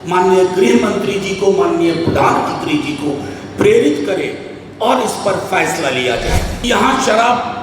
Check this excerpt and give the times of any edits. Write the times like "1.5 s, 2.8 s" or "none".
6.5 s